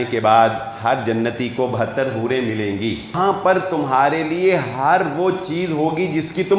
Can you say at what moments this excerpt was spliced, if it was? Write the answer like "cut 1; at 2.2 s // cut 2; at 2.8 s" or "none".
cut 1; at 3.1 s